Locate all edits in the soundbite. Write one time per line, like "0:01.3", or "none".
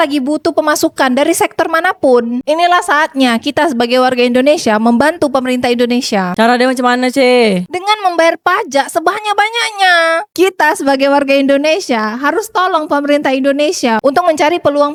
none

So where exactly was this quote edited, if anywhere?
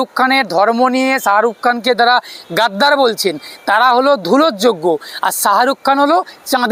none

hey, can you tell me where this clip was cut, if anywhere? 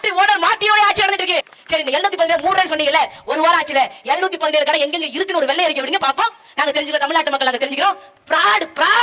0:01.5

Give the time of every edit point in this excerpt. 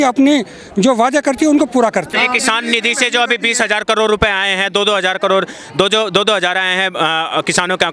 0:02.1

